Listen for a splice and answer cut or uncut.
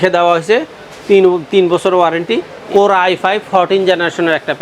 cut